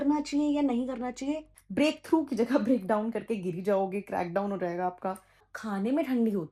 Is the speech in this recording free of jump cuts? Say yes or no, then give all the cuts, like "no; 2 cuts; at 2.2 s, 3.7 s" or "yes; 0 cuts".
no; 2 cuts; at 1.6 s, 5.5 s